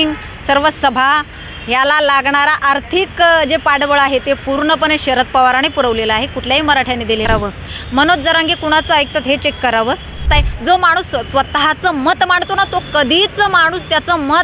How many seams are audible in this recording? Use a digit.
2